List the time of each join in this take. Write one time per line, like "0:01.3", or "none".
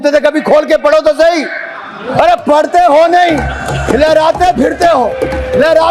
none